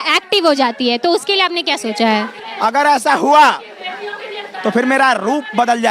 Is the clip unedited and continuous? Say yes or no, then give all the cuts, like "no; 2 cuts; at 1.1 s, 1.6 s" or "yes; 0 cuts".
no; 1 cut; at 2.4 s